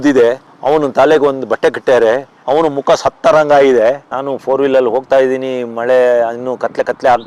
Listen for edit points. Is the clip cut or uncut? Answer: cut